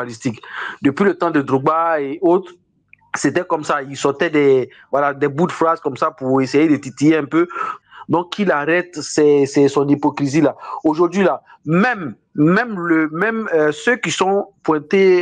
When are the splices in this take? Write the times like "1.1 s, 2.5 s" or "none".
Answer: 7.7 s